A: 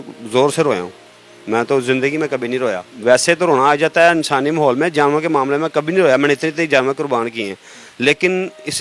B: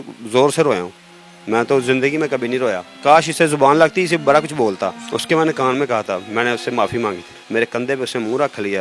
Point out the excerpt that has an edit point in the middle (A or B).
B